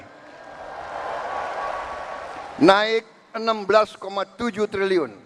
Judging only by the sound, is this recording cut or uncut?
uncut